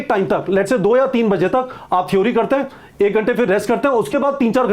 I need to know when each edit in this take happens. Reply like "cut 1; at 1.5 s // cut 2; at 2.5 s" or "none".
none